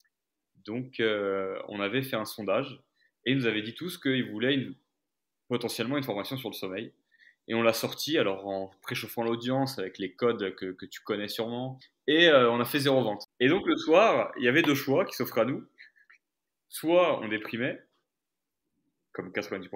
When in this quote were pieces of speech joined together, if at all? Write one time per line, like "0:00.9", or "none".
0:11.8
0:13.2